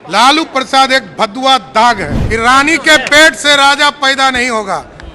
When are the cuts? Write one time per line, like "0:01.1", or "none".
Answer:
0:02.1